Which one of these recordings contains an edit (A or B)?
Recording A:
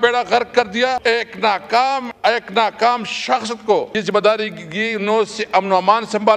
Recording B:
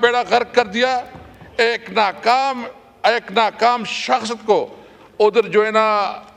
A